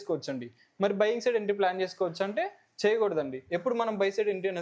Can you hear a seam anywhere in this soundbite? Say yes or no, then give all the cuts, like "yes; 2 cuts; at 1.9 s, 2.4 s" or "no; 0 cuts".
no; 0 cuts